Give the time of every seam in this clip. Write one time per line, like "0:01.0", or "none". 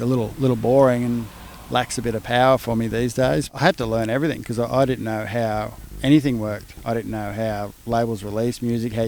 0:03.5